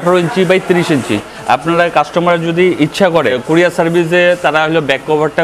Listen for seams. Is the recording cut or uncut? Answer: cut